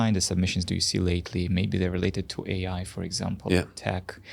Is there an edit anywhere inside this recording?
no; 0 cuts

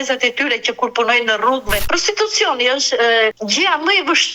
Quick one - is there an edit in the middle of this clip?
yes; 2 cuts; at 1.8 s, 3.4 s

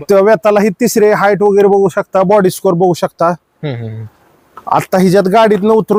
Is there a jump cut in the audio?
no; 0 cuts

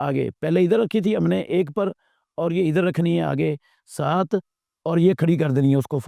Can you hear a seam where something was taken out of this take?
no; 0 cuts

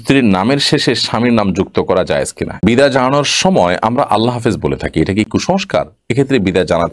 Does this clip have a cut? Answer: yes; 1 cut; at 2.6 s

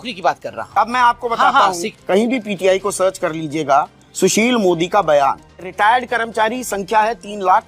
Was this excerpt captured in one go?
no; 2 cuts; at 1.9 s, 5.6 s

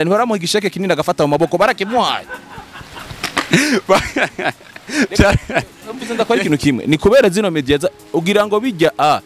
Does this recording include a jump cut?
no; 0 cuts

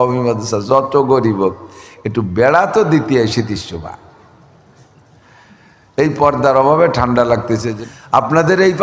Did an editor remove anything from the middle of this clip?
yes; 1 cut; at 7.7 s

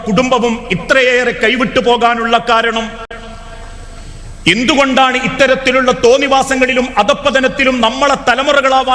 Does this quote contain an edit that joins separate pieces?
no; 0 cuts

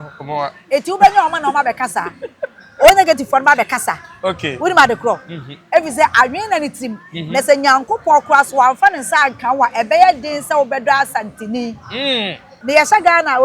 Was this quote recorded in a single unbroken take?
no; 1 cut; at 12.5 s

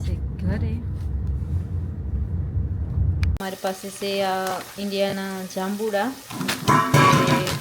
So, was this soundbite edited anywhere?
yes; 1 cut; at 3.3 s

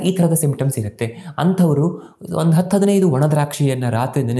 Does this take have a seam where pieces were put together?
no; 0 cuts

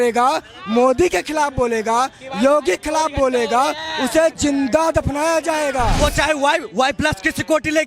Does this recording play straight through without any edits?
no; 1 cut; at 6.0 s

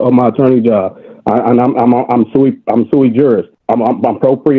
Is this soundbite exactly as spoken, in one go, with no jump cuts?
no; 1 cut; at 3.5 s

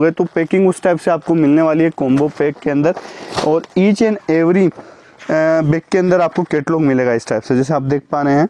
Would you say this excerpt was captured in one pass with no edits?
yes; 0 cuts

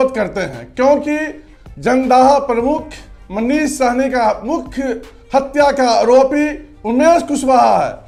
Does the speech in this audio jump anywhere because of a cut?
no; 0 cuts

